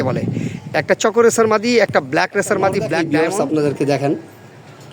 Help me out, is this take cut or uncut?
cut